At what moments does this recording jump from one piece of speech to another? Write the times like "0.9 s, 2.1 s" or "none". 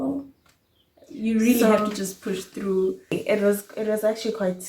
3.2 s